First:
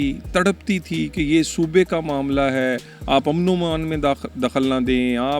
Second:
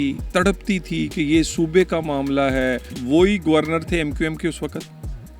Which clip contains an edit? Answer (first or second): second